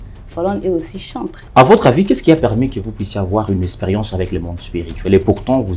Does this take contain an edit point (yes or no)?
yes